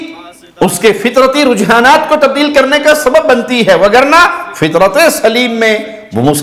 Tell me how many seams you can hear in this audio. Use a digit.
0